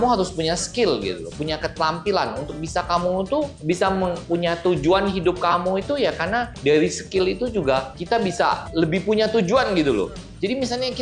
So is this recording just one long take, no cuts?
yes; 0 cuts

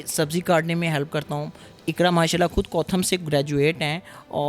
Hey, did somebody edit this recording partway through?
no; 0 cuts

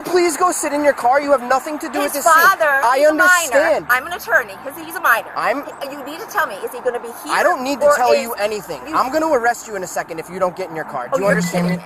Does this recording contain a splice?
no; 0 cuts

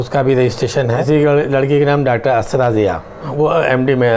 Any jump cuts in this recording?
yes; 2 cuts; at 1.0 s, 3.3 s

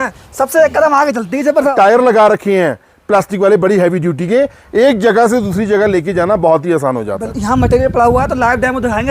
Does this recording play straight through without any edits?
no; 2 cuts; at 1.7 s, 7.1 s

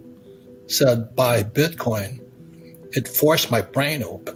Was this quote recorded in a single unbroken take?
yes; 0 cuts

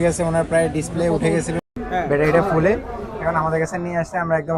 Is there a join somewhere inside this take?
no; 0 cuts

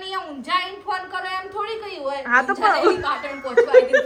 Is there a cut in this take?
no; 0 cuts

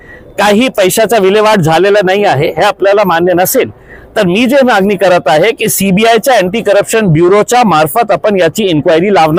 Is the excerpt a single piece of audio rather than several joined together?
yes; 0 cuts

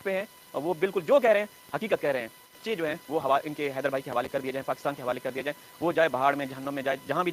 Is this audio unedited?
no; 1 cut; at 2.6 s

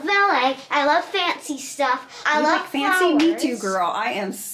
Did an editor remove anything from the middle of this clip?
yes; 1 cut; at 2.1 s

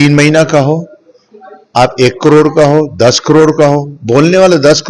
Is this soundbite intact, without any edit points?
yes; 0 cuts

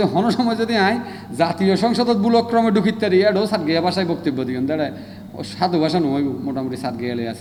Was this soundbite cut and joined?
no; 0 cuts

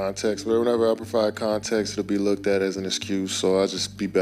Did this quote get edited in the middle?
no; 0 cuts

